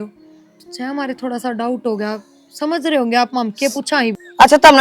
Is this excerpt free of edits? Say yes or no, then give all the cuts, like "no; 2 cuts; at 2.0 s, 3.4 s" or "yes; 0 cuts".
yes; 0 cuts